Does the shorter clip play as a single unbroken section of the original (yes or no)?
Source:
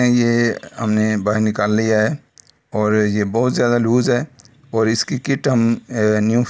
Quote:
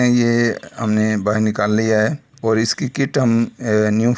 no